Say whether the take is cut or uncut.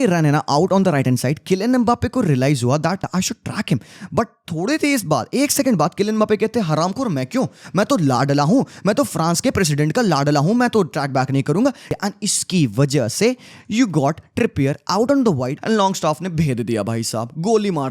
cut